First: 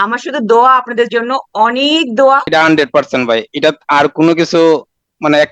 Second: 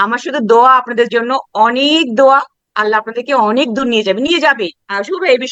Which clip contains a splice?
first; 1 cut; at 2.4 s

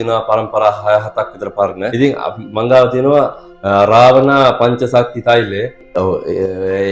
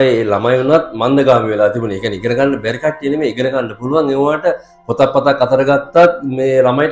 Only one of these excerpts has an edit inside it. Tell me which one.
first; 2 cuts; at 1.9 s, 5.8 s

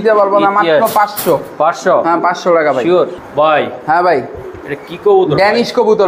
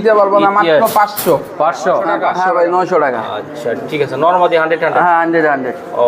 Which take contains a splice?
second; 1 cut; at 2.2 s

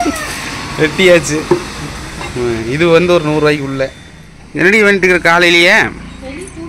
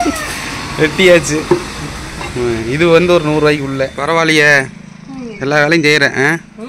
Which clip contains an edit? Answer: second; 1 cut; at 4.0 s

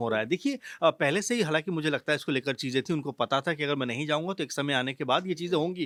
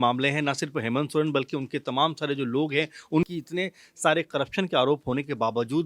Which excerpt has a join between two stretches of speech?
second; 1 cut; at 3.3 s

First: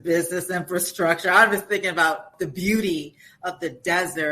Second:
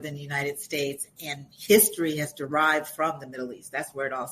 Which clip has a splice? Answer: first; 1 cut; at 2.3 s

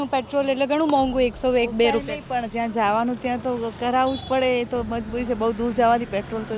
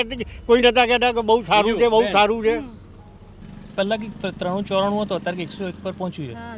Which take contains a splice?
second; 1 cut; at 3.5 s

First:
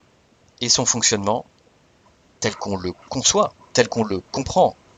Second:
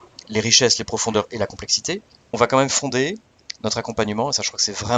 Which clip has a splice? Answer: second; 1 cut; at 2.3 s

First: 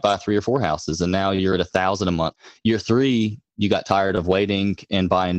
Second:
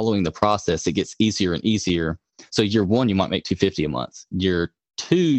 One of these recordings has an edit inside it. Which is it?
first; 1 cut; at 2.4 s

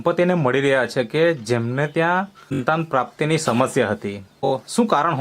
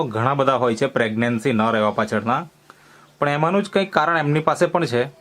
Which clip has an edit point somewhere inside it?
first; 2 cuts; at 2.6 s, 4.5 s

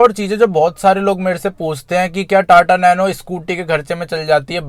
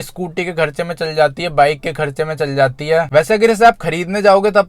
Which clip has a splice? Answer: second; 1 cut; at 3.1 s

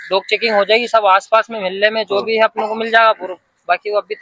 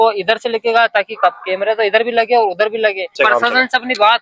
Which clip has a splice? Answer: second; 1 cut; at 3.1 s

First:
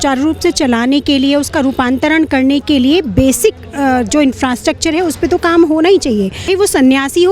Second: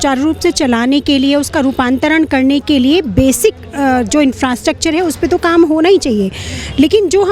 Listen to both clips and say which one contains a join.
first; 1 cut; at 6.4 s

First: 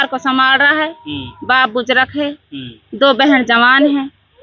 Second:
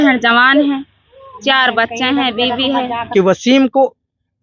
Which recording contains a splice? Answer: second; 1 cut; at 3.0 s

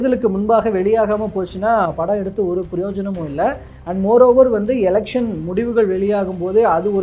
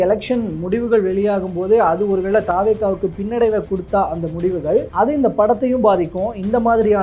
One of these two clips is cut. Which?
second; 2 cuts; at 3.7 s, 4.9 s

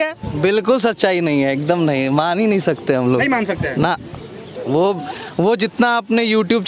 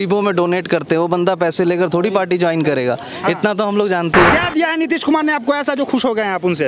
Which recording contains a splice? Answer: second; 1 cut; at 4.3 s

